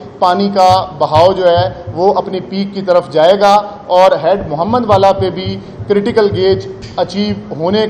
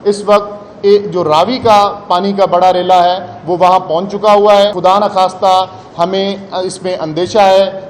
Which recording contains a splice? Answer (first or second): second